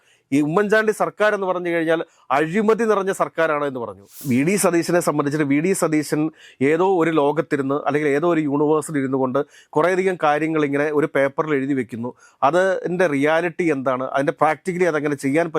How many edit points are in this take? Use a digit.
2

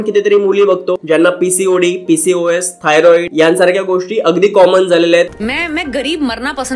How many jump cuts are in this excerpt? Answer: 3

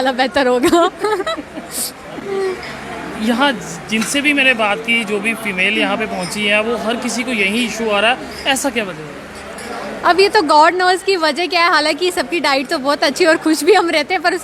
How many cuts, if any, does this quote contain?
0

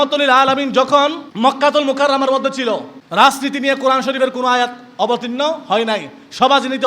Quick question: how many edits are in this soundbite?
2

